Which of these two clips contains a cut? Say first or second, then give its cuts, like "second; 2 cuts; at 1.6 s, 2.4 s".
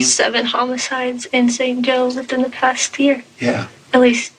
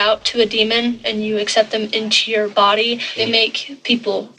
second; 2 cuts; at 1.0 s, 3.2 s